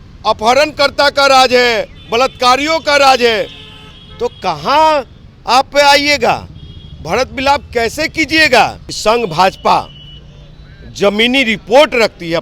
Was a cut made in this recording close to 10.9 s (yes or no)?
no